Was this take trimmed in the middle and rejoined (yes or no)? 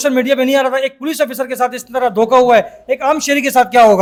no